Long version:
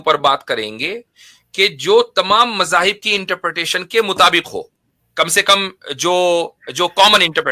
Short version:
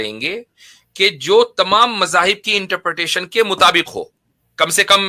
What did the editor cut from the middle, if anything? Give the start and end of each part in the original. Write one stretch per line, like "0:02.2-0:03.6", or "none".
none